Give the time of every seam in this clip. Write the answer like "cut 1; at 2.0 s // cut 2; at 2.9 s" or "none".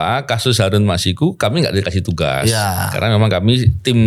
none

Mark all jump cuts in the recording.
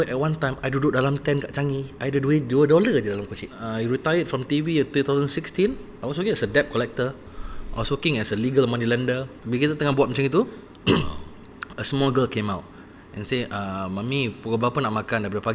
cut 1; at 3.6 s // cut 2; at 5.9 s // cut 3; at 9.3 s

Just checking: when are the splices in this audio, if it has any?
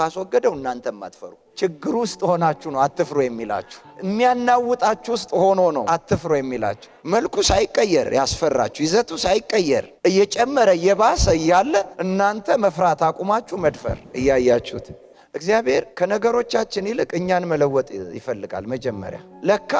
none

